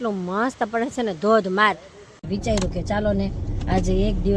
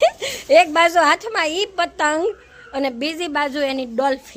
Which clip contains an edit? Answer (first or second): first